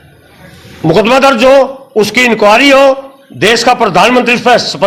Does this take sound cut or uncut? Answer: uncut